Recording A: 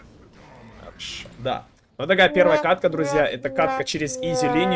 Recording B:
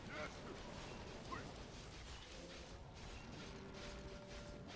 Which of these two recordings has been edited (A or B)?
A